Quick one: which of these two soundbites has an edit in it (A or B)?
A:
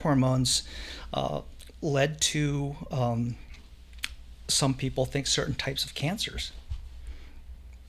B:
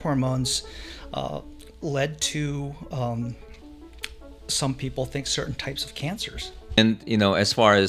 B